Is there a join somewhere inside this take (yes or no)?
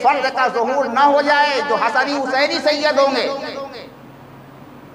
no